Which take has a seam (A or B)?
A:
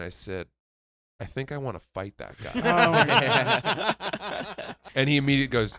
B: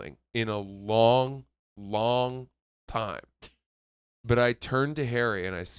A